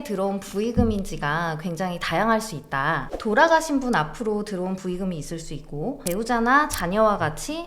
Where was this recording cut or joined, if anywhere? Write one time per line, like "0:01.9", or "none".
0:03.1